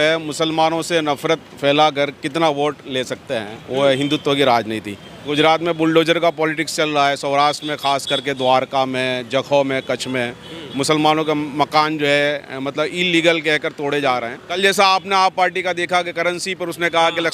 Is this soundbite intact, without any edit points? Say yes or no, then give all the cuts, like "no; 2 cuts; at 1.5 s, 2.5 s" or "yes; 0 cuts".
no; 2 cuts; at 5.3 s, 14.5 s